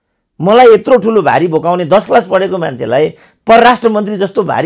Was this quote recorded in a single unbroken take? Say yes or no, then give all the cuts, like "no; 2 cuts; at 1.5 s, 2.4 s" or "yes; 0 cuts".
yes; 0 cuts